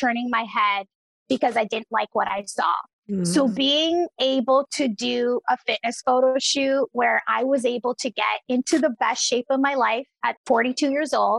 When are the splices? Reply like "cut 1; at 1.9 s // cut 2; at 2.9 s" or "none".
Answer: cut 1; at 10.3 s